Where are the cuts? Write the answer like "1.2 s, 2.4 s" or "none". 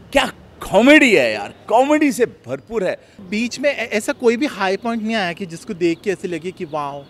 3.1 s